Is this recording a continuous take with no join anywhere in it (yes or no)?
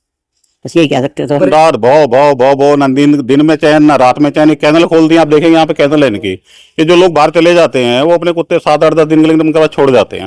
no